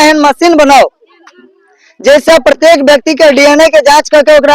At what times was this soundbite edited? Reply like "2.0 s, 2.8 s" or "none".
none